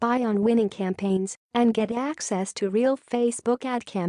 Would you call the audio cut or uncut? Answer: cut